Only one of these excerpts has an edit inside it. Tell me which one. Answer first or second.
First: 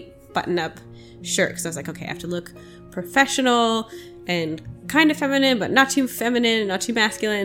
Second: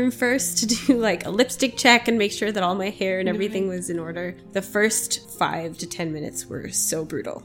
second